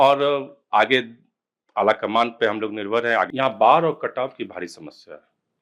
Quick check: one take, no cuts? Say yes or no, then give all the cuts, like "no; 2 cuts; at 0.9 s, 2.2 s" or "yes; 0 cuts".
no; 1 cut; at 3.3 s